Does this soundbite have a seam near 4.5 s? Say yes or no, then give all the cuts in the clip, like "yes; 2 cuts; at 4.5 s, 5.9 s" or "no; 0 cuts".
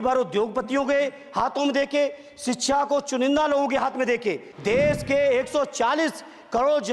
yes; 1 cut; at 4.5 s